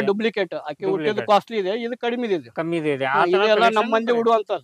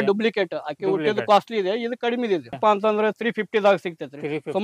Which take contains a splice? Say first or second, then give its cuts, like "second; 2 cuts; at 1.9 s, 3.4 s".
second; 1 cut; at 2.6 s